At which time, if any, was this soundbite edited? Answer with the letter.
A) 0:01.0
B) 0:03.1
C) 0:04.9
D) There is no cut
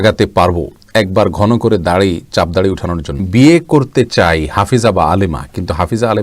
B